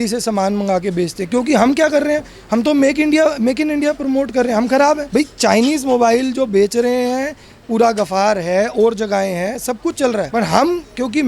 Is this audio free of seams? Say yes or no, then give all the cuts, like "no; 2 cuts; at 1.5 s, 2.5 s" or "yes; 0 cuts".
no; 2 cuts; at 5.0 s, 10.3 s